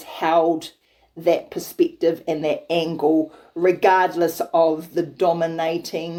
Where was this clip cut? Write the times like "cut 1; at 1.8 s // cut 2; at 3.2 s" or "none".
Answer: none